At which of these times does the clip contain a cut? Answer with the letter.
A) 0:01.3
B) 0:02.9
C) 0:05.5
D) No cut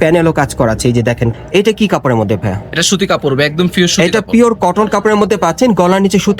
A